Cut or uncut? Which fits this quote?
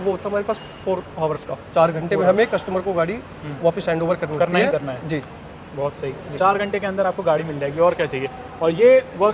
uncut